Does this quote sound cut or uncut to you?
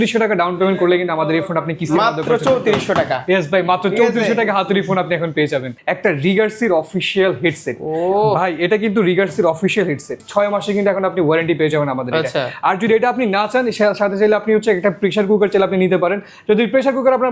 cut